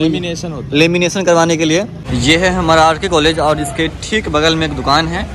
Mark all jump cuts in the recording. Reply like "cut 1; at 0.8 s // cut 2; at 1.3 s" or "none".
cut 1; at 2.0 s